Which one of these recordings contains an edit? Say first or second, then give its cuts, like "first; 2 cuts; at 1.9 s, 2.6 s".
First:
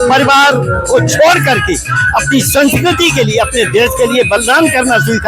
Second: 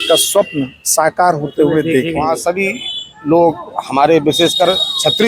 second; 1 cut; at 2.3 s